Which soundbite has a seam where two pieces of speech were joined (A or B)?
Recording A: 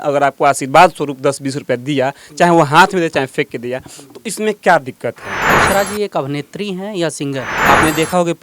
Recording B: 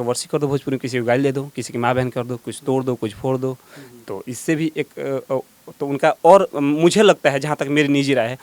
A